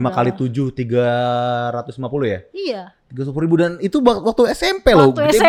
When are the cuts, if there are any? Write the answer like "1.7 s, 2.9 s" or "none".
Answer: none